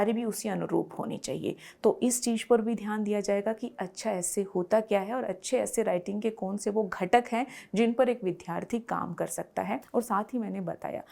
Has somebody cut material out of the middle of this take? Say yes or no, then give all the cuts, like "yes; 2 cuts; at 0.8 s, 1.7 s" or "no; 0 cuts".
no; 0 cuts